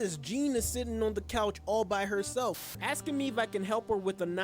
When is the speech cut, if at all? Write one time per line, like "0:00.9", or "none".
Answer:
0:02.7